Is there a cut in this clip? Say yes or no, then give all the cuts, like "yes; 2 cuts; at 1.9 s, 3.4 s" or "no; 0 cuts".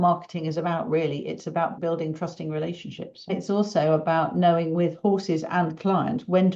yes; 2 cuts; at 1.8 s, 3.3 s